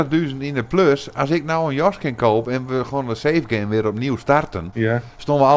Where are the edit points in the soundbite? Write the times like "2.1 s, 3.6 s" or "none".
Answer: 4.6 s